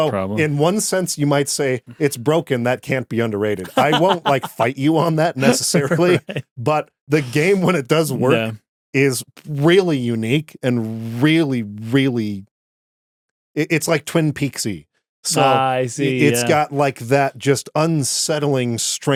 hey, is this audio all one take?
yes; 0 cuts

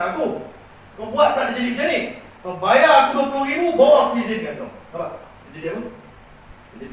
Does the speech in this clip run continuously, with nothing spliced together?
yes; 0 cuts

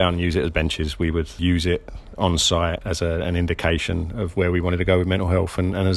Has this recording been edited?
yes; 2 cuts; at 1.4 s, 2.8 s

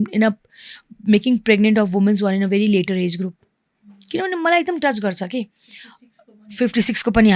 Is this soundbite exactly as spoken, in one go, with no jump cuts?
yes; 0 cuts

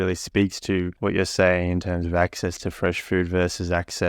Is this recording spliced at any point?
yes; 1 cut; at 0.9 s

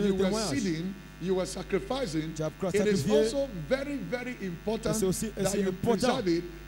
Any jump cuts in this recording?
no; 0 cuts

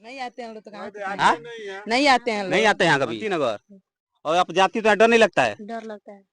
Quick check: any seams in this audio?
yes; 1 cut; at 3.2 s

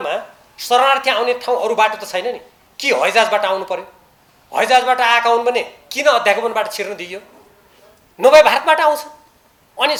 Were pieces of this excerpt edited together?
no; 0 cuts

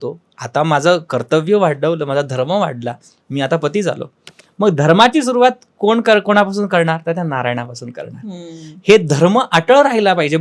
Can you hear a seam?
no; 0 cuts

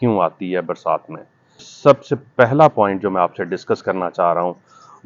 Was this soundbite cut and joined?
yes; 1 cut; at 1.7 s

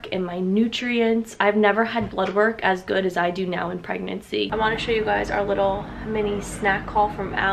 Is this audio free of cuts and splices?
no; 1 cut; at 4.5 s

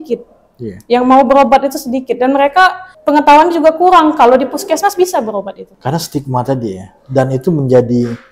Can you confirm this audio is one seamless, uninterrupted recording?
no; 2 cuts; at 2.9 s, 5.6 s

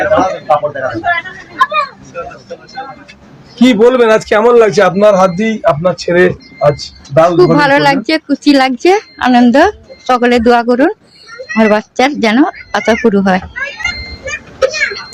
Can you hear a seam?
no; 0 cuts

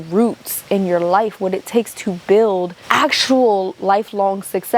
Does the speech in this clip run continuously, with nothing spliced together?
no; 1 cut; at 2.8 s

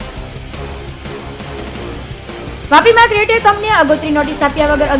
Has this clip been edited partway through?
yes; 1 cut; at 2.6 s

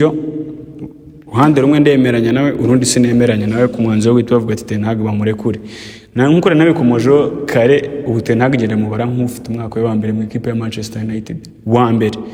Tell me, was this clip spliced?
no; 0 cuts

